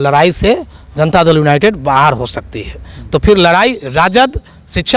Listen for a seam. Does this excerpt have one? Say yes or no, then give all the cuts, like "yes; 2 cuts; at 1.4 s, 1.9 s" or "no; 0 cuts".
no; 0 cuts